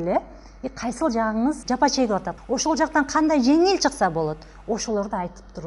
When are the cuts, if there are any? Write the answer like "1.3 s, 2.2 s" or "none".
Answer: 1.6 s, 2.3 s